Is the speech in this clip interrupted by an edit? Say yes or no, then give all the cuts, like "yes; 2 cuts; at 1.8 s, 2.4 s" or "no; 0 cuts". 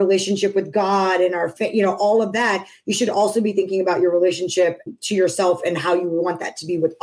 yes; 1 cut; at 4.8 s